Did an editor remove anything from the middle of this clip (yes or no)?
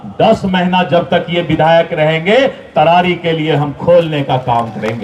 no